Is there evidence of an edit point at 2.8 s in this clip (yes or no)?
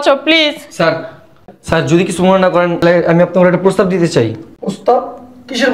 yes